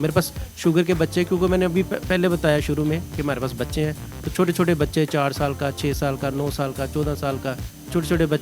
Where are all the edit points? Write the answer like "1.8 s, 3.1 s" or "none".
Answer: none